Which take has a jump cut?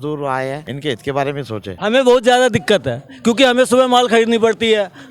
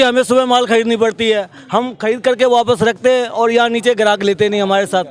first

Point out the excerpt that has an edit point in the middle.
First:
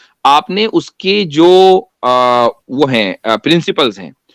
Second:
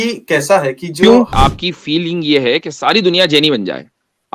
second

